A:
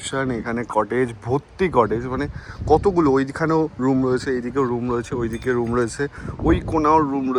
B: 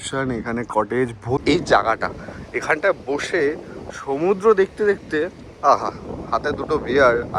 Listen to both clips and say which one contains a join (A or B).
B